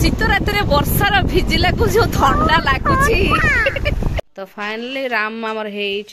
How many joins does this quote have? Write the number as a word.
one